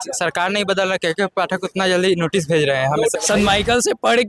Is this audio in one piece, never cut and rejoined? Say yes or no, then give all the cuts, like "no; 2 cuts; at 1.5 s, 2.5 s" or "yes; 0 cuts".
no; 1 cut; at 3.1 s